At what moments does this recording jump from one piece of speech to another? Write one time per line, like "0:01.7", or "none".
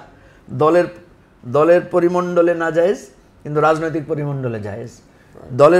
none